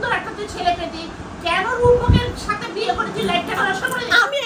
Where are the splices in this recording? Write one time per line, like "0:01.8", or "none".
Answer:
none